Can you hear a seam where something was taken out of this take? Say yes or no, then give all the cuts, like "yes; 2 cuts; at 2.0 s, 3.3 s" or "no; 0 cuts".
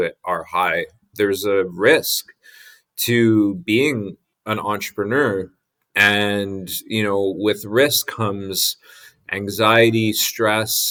no; 0 cuts